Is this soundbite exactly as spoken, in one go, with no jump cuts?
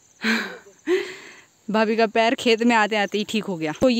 yes; 0 cuts

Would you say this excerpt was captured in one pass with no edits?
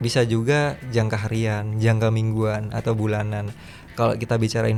yes; 0 cuts

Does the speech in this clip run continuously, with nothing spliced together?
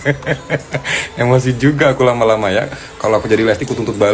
yes; 0 cuts

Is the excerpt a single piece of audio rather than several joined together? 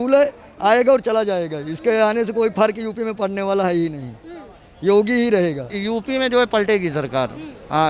yes; 0 cuts

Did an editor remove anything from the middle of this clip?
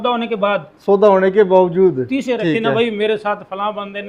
yes; 1 cut; at 2.4 s

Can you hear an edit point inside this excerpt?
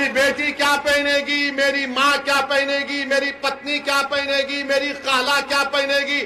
no; 0 cuts

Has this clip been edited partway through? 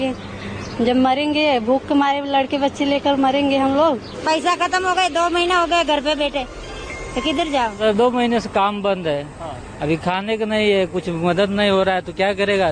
yes; 2 cuts; at 4.2 s, 7.8 s

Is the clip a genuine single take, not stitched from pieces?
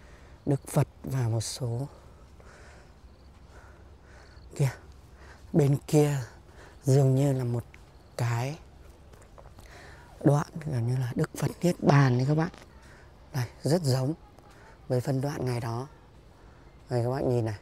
yes; 0 cuts

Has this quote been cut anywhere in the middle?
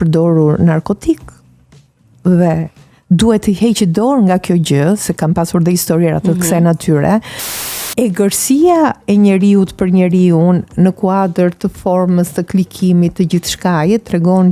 yes; 1 cut; at 7.5 s

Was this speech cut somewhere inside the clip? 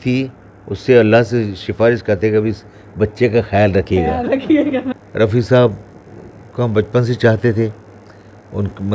yes; 1 cut; at 4.9 s

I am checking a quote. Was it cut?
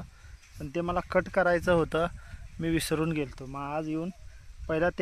no; 0 cuts

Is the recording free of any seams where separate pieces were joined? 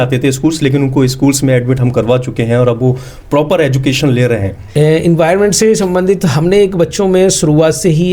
no; 1 cut; at 4.6 s

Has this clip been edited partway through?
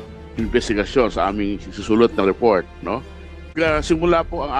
yes; 1 cut; at 3.5 s

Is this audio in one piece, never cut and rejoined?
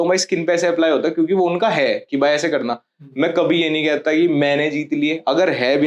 yes; 0 cuts

